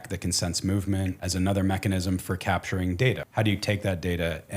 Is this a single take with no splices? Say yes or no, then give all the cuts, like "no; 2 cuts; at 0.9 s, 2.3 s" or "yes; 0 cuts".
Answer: no; 2 cuts; at 1.2 s, 3.2 s